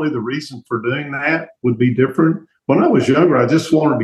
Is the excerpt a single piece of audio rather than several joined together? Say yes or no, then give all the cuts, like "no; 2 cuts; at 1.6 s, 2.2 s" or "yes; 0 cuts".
yes; 0 cuts